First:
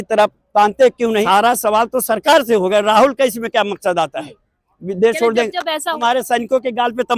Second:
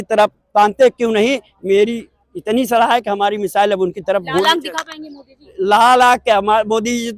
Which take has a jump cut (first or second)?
first